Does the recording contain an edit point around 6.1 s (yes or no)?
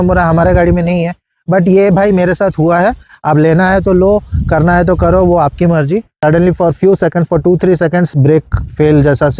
yes